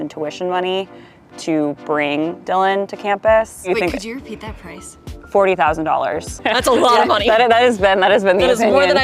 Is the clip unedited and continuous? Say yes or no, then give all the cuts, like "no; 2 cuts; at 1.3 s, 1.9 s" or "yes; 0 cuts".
no; 1 cut; at 6.4 s